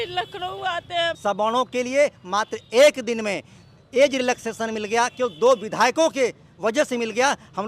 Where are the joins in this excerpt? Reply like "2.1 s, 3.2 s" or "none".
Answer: 1.2 s